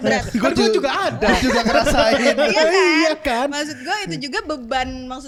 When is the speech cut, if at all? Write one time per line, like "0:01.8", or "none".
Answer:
none